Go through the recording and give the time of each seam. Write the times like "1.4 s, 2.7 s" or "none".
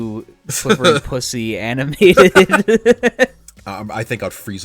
3.5 s